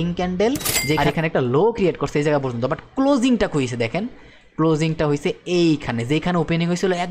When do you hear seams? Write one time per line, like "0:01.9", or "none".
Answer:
0:01.0